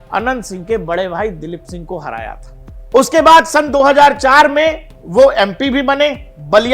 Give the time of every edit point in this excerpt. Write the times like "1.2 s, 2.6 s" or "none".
none